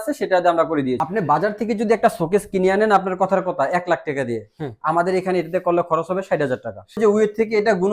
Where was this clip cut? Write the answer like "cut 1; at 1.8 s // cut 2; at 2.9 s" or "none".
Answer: cut 1; at 1.0 s // cut 2; at 7.0 s